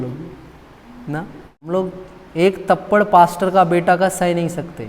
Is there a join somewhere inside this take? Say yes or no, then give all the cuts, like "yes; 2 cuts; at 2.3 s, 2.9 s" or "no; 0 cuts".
yes; 1 cut; at 1.7 s